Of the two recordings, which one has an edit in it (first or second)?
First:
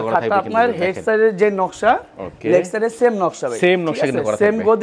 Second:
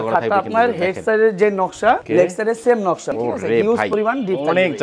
second